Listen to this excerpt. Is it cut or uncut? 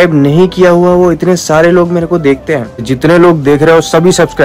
cut